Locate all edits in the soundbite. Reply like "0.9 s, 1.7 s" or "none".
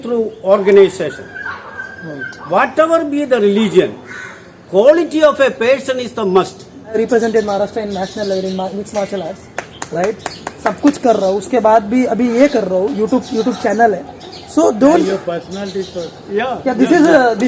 7.0 s